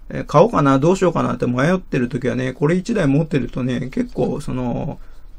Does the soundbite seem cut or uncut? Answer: uncut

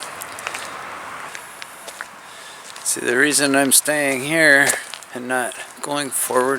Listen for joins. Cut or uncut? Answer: cut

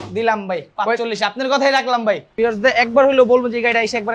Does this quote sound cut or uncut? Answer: cut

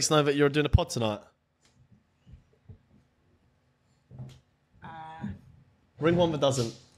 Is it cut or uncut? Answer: uncut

